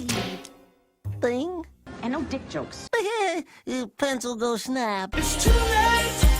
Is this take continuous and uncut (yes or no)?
no